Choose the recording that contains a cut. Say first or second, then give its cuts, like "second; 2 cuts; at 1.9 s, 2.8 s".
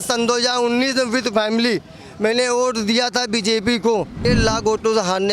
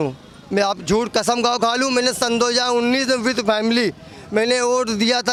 first; 1 cut; at 4.3 s